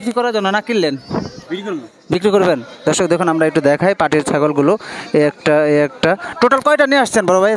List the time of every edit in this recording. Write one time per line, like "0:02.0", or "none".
none